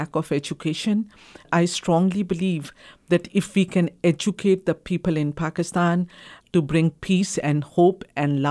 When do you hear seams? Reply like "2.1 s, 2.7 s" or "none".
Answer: 1.5 s, 6.3 s